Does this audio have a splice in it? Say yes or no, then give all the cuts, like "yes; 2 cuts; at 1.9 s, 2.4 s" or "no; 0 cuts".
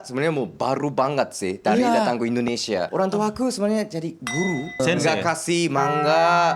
yes; 2 cuts; at 2.9 s, 4.8 s